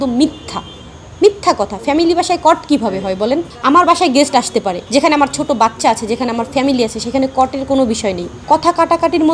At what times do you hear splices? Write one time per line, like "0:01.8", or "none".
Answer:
0:03.5
0:04.8
0:08.3